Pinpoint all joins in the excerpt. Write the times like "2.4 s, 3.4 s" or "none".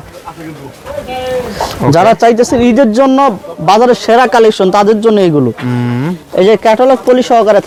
none